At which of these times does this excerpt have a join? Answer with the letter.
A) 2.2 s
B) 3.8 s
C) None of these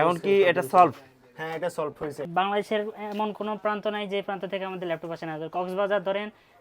A